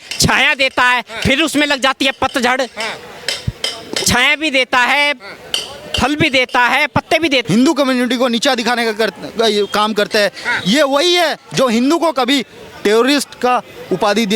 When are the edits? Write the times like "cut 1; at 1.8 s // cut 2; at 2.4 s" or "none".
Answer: cut 1; at 7.4 s